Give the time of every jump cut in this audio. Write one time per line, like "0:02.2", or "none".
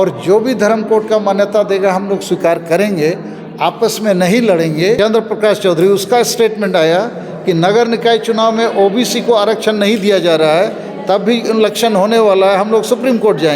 0:05.0